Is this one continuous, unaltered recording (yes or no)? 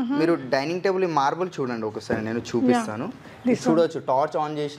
yes